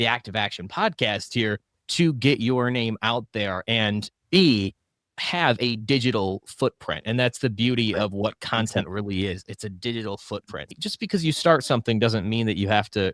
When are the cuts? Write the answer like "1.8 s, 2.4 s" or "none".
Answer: 10.8 s